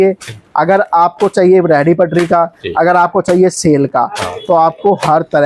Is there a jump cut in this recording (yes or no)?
no